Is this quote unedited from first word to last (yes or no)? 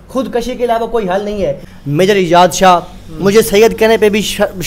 no